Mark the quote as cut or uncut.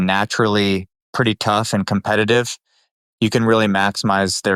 cut